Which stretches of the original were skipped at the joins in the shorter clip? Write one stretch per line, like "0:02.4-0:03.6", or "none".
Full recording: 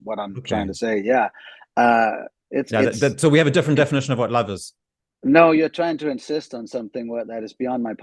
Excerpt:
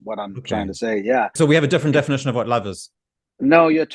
0:01.3-0:03.2